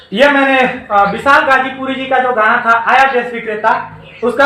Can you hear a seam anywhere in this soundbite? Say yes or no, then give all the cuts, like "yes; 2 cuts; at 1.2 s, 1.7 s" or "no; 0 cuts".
no; 0 cuts